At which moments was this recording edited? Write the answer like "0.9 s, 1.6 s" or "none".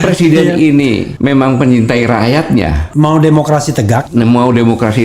1.1 s, 2.8 s, 4.0 s